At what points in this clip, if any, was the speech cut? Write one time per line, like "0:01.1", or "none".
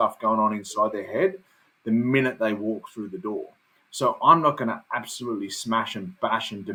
none